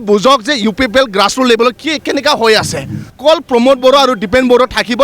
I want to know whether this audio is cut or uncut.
cut